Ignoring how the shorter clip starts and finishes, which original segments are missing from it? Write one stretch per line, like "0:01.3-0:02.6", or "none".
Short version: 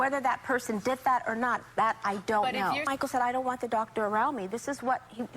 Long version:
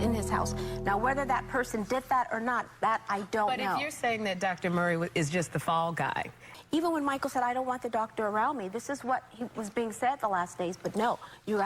0:03.9-0:07.1